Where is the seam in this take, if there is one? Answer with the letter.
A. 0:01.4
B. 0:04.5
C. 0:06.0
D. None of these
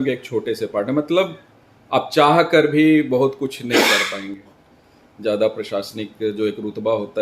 B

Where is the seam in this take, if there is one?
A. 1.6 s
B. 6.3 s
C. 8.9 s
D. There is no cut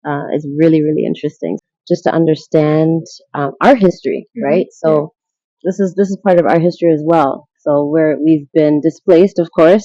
A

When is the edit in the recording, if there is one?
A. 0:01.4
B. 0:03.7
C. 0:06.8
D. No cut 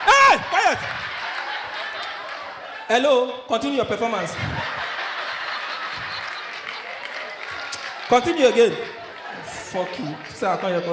D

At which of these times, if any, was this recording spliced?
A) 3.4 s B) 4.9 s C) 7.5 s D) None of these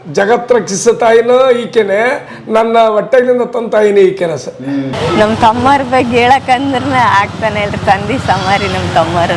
B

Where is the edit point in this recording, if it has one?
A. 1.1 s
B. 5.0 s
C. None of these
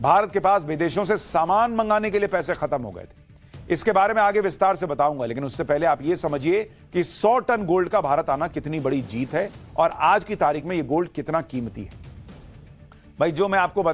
A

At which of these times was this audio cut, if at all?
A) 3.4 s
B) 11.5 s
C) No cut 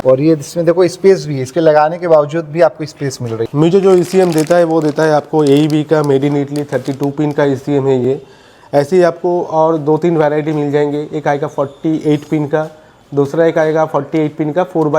A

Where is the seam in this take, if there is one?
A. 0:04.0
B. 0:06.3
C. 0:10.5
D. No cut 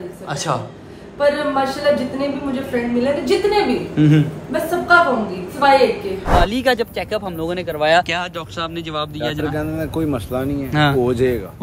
B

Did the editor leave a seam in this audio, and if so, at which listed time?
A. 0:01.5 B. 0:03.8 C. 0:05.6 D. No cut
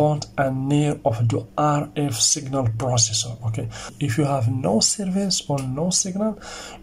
B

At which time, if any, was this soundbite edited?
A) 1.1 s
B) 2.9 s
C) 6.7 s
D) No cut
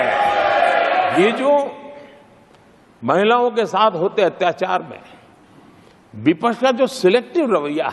A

